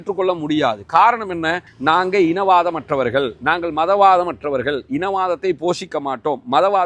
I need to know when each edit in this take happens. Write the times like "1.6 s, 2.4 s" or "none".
1.7 s